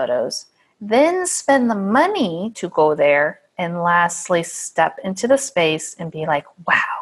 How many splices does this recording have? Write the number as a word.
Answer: zero